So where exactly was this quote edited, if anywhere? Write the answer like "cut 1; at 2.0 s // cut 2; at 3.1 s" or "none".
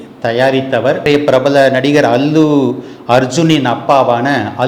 cut 1; at 1.1 s